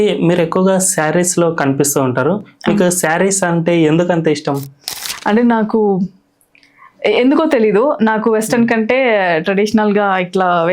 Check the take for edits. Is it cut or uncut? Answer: uncut